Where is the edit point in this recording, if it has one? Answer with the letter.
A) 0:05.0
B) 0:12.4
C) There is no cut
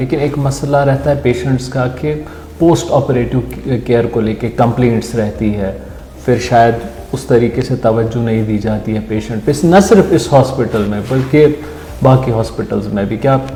C